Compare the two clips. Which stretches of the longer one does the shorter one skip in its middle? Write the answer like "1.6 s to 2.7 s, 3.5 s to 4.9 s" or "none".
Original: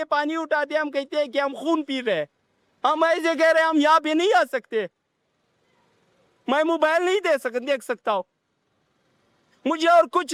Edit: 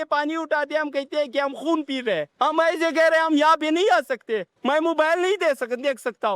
2.3 s to 2.7 s, 4.9 s to 6.4 s